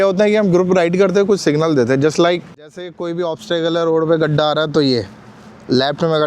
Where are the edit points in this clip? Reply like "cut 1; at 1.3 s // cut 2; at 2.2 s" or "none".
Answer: cut 1; at 2.9 s